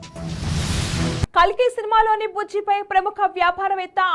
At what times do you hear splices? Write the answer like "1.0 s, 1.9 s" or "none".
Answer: 1.3 s